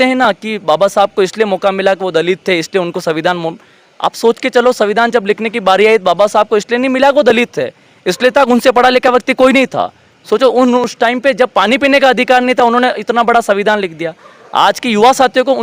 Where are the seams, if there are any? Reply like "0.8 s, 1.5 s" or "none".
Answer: none